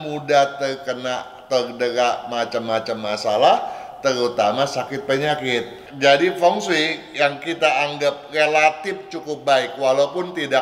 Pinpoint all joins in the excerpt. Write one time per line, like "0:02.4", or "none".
0:05.8